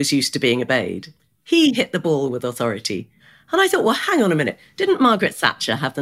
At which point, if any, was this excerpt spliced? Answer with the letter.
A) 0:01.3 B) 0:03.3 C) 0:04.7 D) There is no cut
B